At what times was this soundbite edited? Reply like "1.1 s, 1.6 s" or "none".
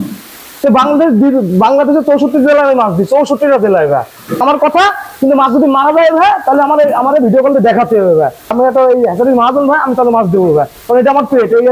4.4 s, 8.5 s